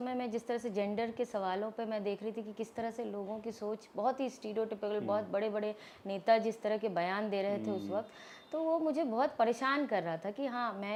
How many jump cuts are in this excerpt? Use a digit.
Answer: 0